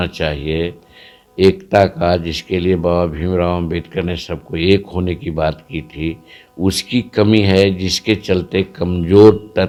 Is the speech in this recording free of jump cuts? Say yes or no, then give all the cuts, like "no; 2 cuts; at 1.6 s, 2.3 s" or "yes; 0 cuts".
yes; 0 cuts